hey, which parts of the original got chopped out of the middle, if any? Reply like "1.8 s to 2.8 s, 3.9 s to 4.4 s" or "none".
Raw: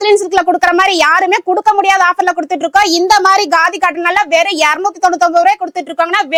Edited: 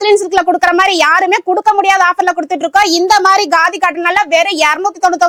none